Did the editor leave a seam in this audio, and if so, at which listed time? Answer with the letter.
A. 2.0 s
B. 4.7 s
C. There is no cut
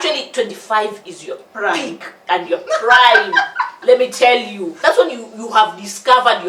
B